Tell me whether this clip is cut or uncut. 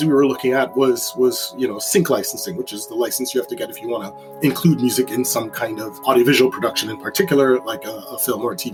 uncut